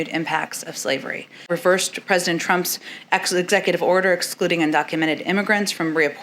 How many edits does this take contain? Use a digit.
1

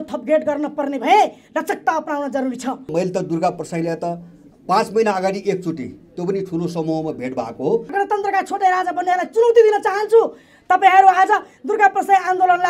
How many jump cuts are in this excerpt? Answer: 2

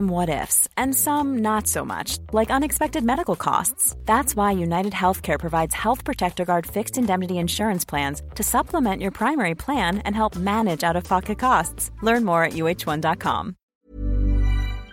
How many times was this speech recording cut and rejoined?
1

